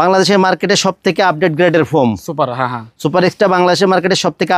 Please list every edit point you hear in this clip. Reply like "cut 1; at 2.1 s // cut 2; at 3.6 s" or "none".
none